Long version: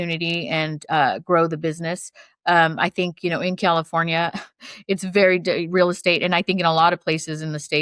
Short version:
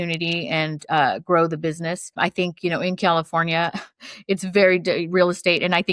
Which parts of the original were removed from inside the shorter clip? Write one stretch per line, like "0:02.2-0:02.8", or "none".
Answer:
0:02.1-0:02.7